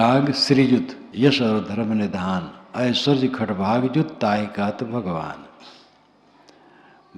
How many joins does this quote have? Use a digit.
1